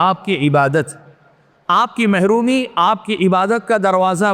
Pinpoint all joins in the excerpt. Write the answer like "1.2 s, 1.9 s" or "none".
none

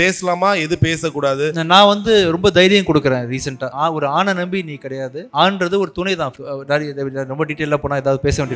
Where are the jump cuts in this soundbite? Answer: 3.7 s, 5.2 s, 6.3 s

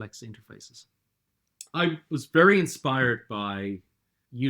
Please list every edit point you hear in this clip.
1.1 s

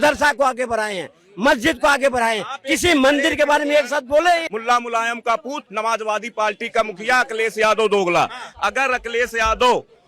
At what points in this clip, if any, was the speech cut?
4.4 s

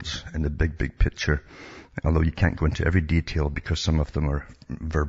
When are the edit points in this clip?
none

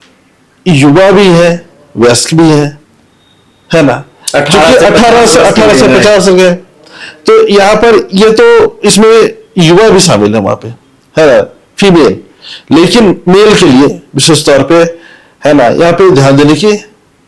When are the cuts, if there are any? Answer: none

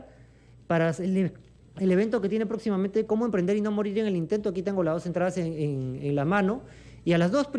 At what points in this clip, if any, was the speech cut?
none

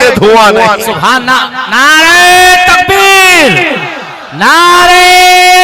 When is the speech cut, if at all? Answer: none

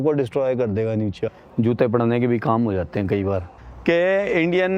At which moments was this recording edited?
1.3 s, 3.5 s

